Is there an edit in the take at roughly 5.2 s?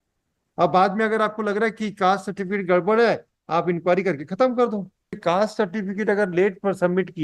yes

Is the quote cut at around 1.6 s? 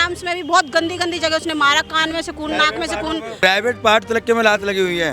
no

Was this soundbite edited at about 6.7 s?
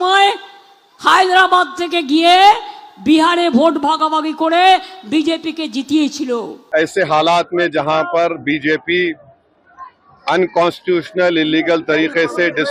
yes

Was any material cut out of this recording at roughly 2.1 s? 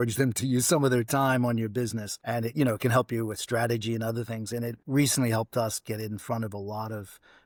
no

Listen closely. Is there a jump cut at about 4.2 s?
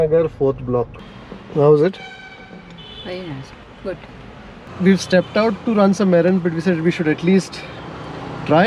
no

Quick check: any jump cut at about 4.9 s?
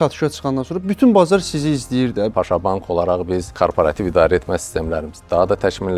no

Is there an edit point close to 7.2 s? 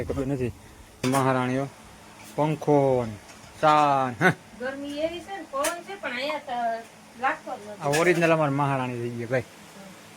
no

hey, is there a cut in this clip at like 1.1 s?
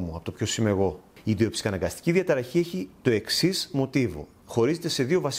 yes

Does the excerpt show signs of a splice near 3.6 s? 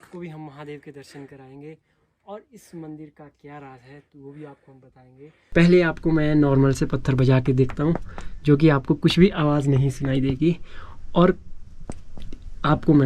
no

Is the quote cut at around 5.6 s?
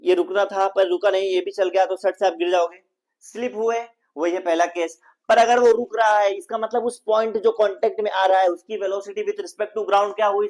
no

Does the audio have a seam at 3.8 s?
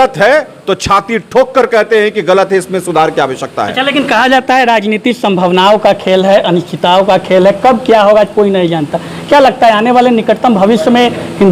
no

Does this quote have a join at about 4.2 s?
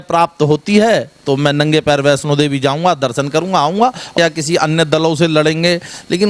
yes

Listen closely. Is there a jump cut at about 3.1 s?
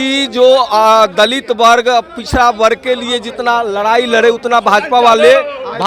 no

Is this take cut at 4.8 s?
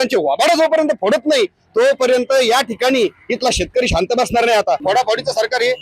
yes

